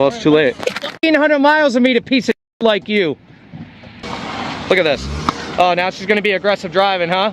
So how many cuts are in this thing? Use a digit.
2